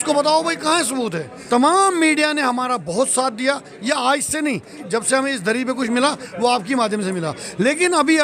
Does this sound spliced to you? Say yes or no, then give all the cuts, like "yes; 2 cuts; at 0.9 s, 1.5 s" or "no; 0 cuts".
yes; 2 cuts; at 1.3 s, 4.8 s